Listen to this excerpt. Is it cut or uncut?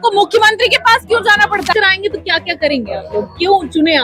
cut